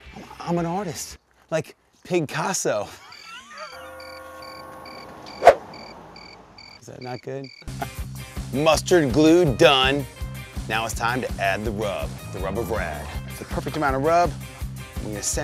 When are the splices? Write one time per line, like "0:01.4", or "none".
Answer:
none